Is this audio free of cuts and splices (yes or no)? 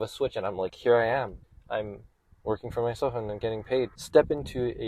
no